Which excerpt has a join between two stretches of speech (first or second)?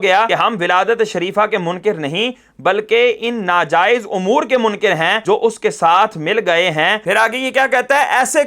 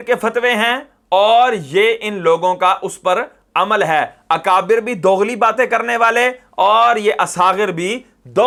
first